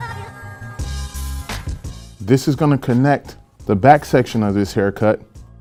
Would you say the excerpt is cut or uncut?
uncut